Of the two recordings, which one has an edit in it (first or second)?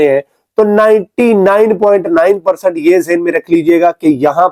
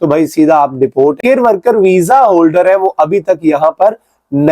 second